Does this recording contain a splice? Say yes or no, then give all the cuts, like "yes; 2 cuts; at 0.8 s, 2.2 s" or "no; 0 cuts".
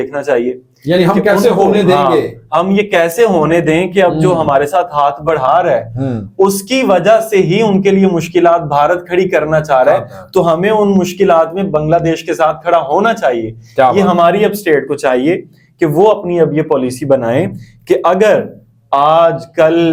no; 0 cuts